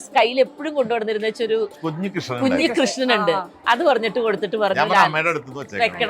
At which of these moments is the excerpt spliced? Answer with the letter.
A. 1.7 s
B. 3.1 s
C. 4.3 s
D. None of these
A